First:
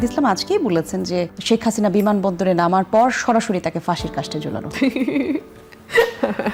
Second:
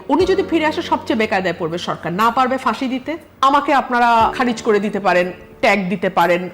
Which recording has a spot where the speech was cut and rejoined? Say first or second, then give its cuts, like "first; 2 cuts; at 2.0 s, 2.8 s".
second; 2 cuts; at 3.2 s, 4.3 s